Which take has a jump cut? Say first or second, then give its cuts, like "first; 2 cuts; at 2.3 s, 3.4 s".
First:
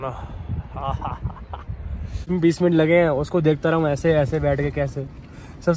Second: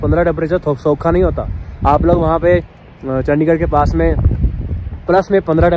first; 1 cut; at 2.3 s